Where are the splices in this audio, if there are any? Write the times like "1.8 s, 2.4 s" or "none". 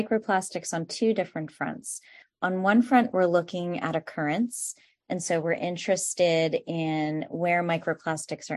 none